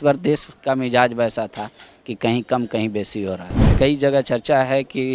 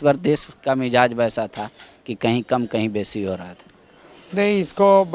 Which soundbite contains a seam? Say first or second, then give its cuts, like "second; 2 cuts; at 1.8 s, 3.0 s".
first; 1 cut; at 3.7 s